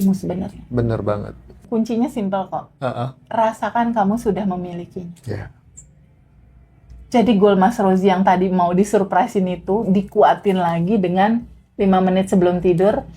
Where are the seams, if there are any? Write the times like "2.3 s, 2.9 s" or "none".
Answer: 1.5 s